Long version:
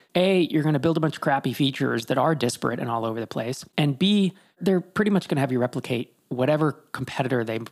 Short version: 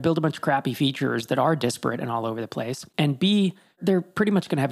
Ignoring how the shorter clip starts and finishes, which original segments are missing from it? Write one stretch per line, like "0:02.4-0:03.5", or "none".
none